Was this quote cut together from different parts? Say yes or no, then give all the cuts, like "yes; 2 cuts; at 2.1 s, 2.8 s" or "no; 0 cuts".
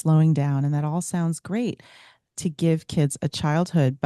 no; 0 cuts